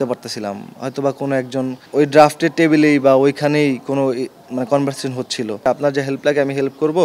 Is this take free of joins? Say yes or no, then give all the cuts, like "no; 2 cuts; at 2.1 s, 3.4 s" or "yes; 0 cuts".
no; 2 cuts; at 1.8 s, 5.7 s